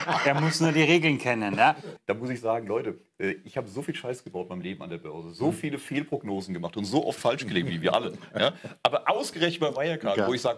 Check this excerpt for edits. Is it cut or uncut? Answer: cut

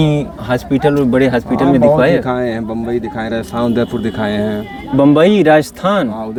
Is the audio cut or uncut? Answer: uncut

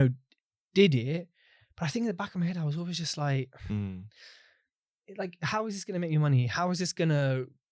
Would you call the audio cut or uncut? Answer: uncut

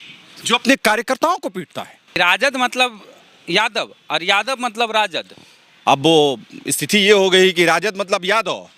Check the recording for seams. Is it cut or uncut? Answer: cut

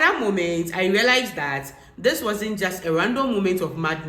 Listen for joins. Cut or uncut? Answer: uncut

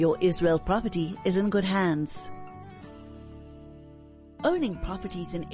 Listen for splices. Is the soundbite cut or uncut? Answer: cut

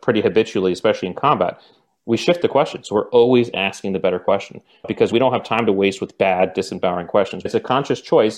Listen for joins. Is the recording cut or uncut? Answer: cut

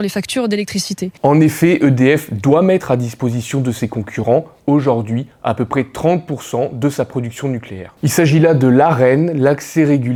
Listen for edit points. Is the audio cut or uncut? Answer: uncut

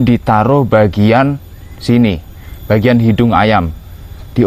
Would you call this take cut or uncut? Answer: uncut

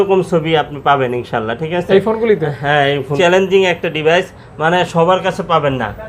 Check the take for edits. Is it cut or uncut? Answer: cut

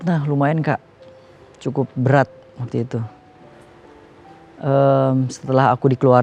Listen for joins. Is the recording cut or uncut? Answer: uncut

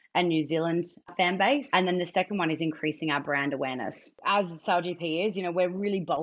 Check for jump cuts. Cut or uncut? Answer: cut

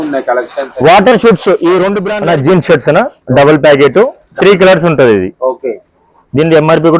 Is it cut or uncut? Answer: cut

